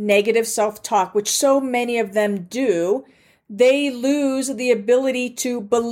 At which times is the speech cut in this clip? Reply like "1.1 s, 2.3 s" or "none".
none

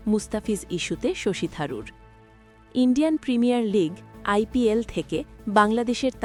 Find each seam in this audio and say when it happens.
none

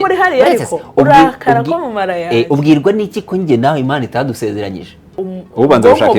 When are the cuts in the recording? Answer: 5.0 s

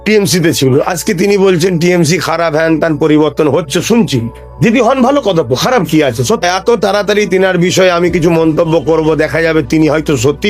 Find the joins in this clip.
6.4 s

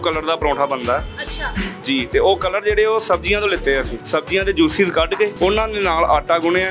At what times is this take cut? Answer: 4.0 s, 5.3 s

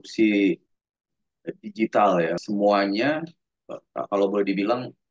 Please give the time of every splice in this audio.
2.4 s

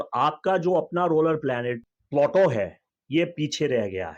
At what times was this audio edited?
1.9 s

